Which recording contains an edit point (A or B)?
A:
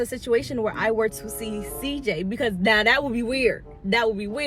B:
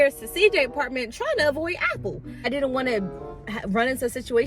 B